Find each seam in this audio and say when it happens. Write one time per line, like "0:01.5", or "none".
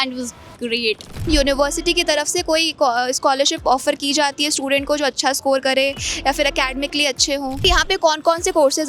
0:01.3
0:07.6